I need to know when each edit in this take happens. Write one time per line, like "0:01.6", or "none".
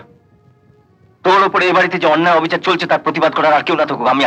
none